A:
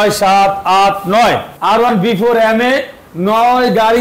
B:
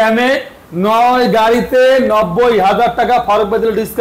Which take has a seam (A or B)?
A